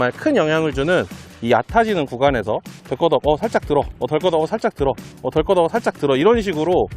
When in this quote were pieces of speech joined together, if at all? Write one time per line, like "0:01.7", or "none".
0:01.3